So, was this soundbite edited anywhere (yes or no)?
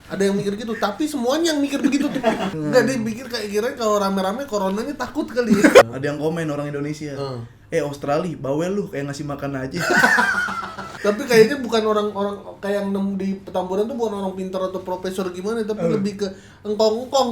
yes